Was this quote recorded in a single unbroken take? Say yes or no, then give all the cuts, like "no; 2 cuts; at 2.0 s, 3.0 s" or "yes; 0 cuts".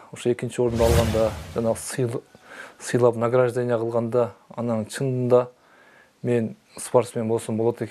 yes; 0 cuts